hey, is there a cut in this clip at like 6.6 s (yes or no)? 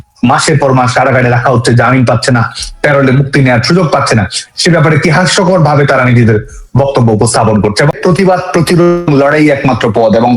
no